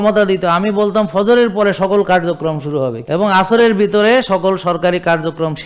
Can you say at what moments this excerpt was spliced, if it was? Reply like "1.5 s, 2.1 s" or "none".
3.0 s